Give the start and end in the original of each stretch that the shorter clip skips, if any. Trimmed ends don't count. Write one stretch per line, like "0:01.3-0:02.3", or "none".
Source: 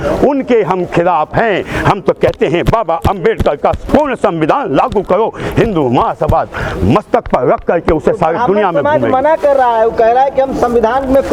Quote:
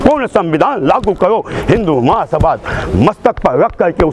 none